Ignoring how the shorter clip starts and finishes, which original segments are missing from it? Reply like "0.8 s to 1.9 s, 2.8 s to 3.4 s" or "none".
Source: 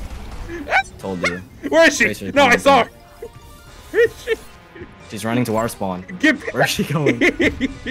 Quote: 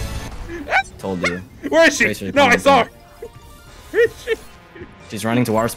none